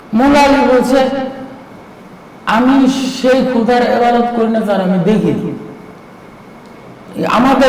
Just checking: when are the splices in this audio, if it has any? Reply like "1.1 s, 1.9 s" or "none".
6.7 s

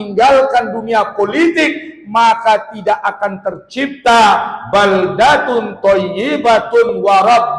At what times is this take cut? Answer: none

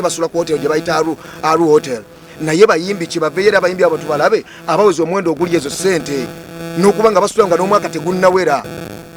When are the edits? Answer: none

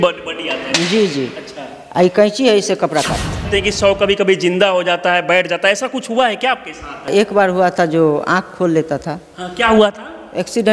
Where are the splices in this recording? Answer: 3.5 s, 7.1 s

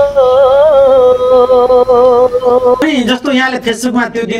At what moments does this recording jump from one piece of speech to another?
2.8 s

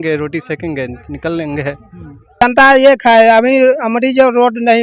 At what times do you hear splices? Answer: 2.4 s

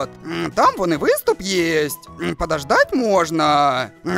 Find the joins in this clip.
none

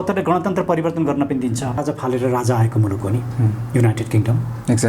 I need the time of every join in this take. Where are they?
1.8 s

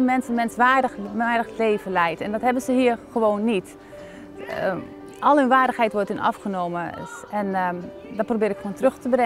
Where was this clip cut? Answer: none

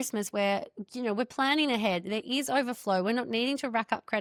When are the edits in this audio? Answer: none

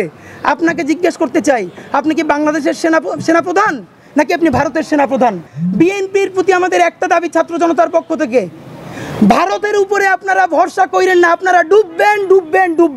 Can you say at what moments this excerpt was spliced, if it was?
5.5 s

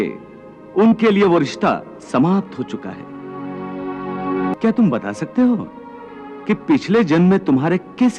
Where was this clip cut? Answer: 4.5 s

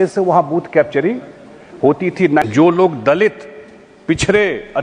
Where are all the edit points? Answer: 2.4 s

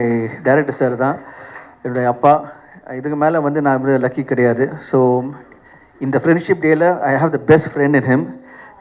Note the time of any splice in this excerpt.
none

